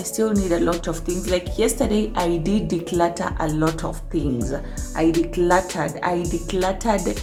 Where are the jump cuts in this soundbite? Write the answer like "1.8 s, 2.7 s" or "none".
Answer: none